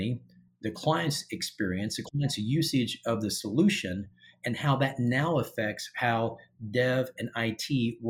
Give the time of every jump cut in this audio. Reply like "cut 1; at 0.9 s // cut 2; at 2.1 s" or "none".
none